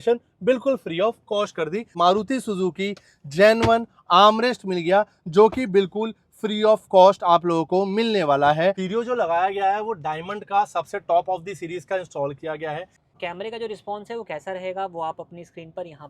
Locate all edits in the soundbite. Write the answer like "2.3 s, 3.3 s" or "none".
1.9 s, 8.8 s, 13.0 s